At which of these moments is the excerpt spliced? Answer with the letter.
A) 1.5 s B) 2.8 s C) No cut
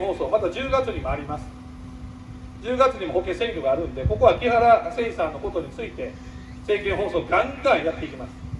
C